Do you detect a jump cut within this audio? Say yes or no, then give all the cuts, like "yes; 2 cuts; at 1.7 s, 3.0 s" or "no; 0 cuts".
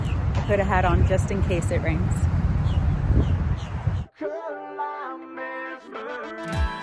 no; 0 cuts